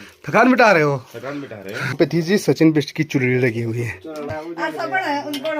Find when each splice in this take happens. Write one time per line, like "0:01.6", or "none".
0:01.9
0:04.3